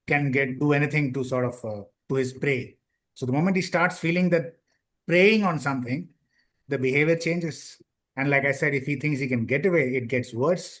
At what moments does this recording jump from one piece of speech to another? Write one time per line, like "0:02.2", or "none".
none

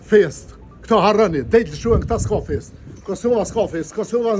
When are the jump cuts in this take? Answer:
none

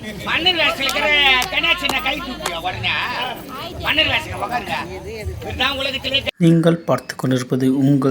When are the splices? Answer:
0:06.3

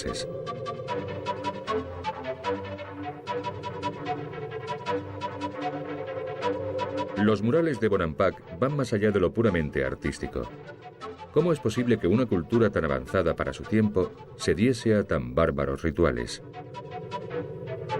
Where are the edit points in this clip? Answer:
0:10.0

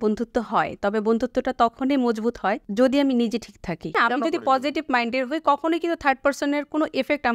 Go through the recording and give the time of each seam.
0:02.6
0:03.9

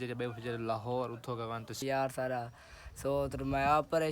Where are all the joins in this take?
0:01.8

